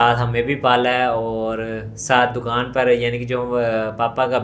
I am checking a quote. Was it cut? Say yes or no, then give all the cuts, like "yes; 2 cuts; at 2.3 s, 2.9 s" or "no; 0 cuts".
no; 0 cuts